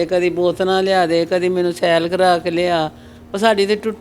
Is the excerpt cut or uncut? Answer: uncut